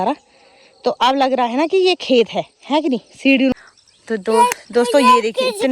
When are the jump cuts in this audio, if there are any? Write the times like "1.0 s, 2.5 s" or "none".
3.5 s